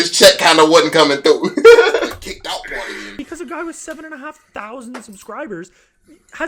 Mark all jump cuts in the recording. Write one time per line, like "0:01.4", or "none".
0:03.2